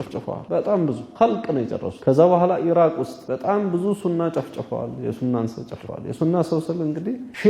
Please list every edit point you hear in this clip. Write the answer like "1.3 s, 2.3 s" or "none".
none